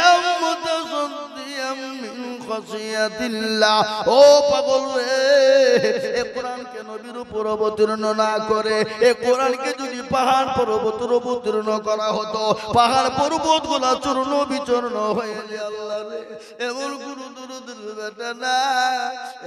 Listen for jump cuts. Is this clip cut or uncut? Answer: cut